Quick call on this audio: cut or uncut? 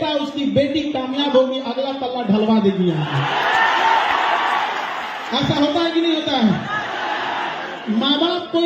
uncut